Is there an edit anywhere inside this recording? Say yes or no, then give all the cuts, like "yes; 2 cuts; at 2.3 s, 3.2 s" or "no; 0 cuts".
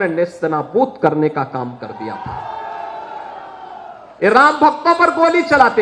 no; 0 cuts